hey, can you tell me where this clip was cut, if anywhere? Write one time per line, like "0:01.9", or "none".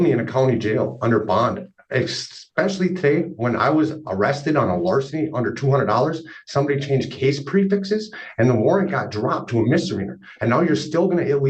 none